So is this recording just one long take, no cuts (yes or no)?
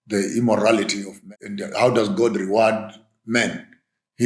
no